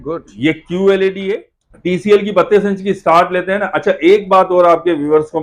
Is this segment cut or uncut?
cut